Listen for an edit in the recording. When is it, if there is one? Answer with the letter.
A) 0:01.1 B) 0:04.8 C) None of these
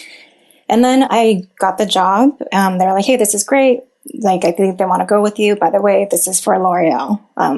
A